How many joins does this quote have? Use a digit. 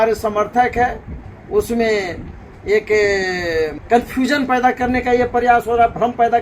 1